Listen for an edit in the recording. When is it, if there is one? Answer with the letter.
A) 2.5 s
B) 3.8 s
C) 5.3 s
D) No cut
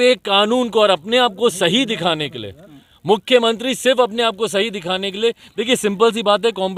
D